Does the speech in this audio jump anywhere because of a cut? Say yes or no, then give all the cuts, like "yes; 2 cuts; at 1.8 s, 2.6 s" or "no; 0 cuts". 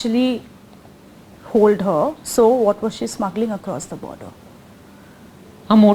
no; 0 cuts